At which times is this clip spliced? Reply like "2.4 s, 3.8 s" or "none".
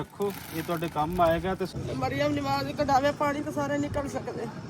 1.7 s